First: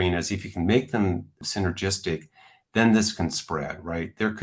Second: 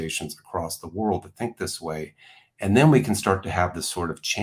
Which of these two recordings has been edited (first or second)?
first